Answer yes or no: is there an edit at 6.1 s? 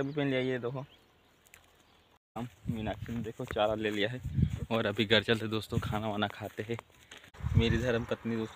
no